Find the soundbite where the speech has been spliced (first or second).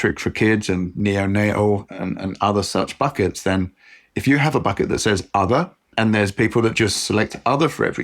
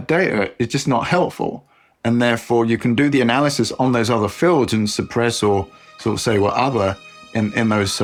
first